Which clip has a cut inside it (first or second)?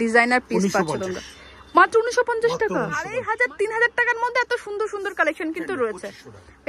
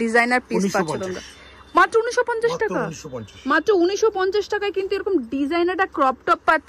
first